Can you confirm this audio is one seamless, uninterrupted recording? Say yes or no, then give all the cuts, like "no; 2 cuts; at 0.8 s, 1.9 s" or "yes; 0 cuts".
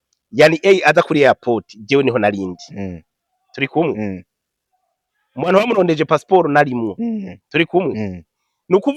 yes; 0 cuts